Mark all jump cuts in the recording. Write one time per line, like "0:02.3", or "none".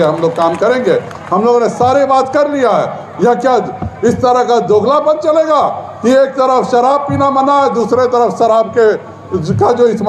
none

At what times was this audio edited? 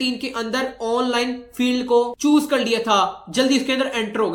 none

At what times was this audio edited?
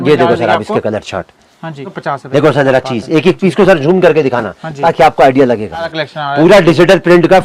0:02.0
0:06.0

